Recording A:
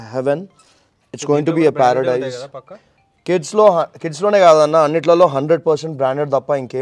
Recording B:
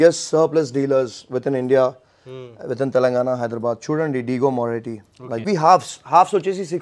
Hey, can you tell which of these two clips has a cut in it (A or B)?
B